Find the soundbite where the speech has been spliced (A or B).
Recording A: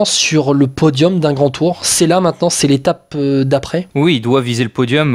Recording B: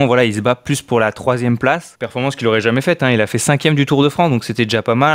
B